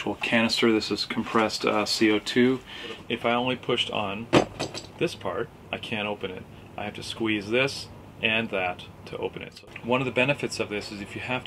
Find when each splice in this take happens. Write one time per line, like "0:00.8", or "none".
0:03.0
0:09.6